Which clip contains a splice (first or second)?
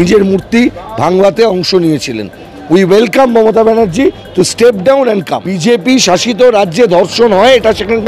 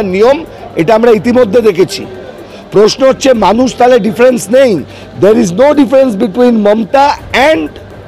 first